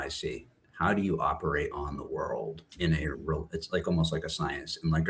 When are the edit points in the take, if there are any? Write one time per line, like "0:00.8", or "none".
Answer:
none

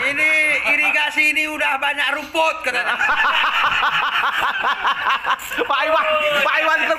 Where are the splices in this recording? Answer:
none

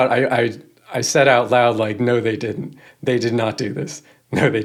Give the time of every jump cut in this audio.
none

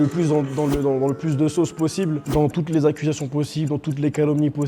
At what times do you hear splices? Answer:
0:02.2

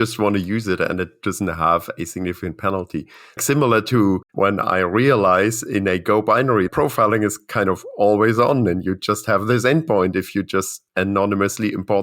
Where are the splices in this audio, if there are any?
0:03.4
0:04.3
0:06.7
0:10.8

